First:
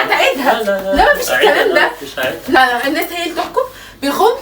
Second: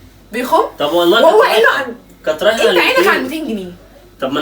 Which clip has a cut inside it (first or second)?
first